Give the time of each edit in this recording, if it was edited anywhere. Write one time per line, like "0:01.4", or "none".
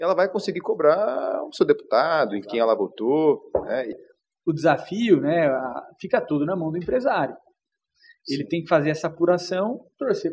0:03.9

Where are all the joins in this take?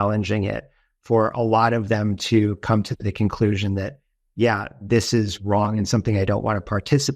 none

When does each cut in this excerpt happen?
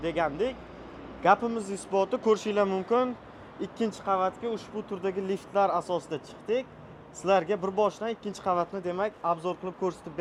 none

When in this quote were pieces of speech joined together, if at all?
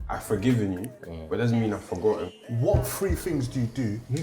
0:02.3

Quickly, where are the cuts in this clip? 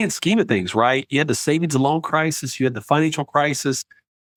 none

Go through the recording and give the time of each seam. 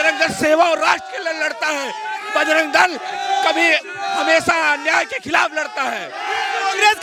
none

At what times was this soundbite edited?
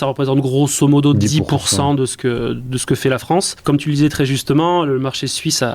0:03.5

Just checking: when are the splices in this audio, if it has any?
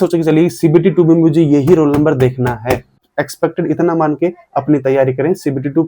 0:03.0

